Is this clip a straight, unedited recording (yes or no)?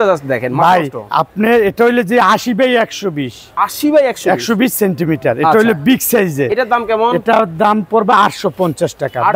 yes